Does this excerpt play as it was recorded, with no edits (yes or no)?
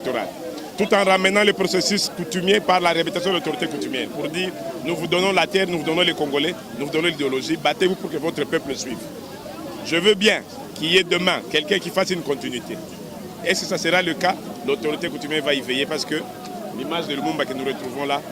yes